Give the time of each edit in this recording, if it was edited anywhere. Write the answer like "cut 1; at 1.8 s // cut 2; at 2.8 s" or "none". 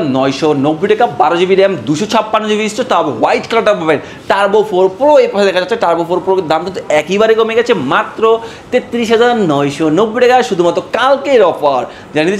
none